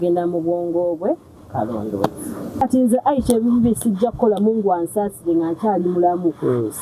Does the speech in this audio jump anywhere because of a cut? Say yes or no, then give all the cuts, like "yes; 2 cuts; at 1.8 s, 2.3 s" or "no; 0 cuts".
yes; 1 cut; at 2.6 s